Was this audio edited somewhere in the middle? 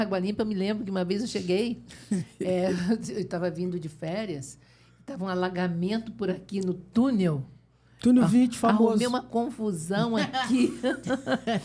no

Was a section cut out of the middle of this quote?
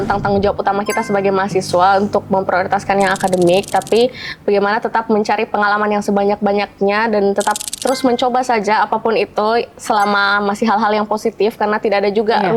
no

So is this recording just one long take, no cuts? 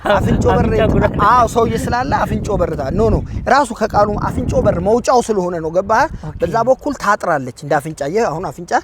yes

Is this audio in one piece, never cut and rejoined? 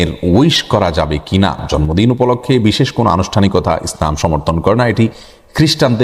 yes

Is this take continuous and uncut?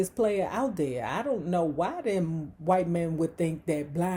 yes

